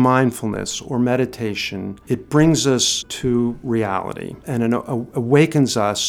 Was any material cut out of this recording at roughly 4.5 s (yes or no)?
yes